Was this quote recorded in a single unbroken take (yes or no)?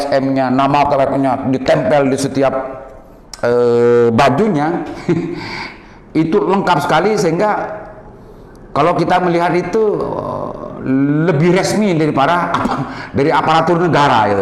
yes